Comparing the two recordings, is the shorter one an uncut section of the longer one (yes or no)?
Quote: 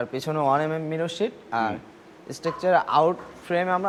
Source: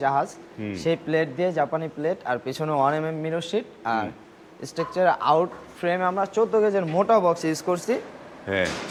yes